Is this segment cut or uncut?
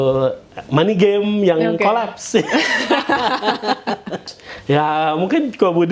cut